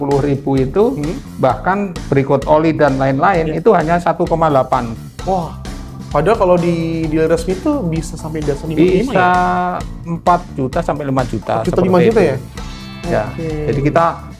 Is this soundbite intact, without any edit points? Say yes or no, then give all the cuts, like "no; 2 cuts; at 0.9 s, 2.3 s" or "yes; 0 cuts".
yes; 0 cuts